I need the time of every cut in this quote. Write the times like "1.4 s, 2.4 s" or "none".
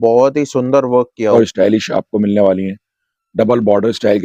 1.3 s